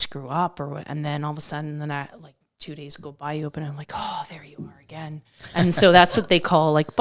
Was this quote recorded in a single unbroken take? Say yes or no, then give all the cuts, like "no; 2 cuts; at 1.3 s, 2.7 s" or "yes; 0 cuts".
yes; 0 cuts